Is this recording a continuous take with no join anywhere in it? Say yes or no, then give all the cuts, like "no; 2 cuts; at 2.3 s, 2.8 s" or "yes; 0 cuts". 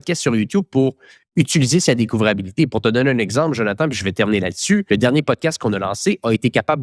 yes; 0 cuts